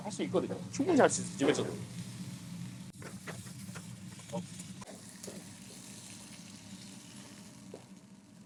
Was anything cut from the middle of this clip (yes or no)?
no